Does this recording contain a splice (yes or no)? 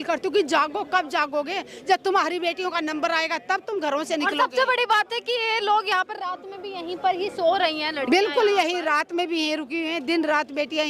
no